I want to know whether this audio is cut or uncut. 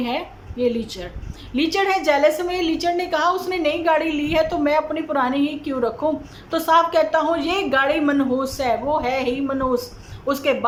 uncut